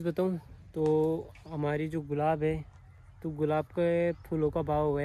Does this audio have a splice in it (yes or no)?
no